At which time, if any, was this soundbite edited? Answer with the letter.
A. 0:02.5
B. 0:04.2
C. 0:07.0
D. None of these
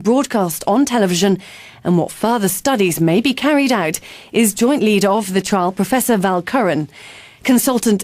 A